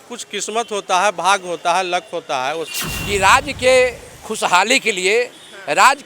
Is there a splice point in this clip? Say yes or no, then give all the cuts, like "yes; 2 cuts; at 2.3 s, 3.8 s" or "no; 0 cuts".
yes; 1 cut; at 2.6 s